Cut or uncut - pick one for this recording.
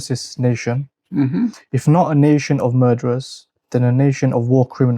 cut